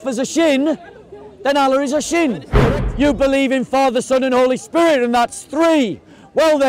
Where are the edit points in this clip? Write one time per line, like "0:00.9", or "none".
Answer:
0:02.6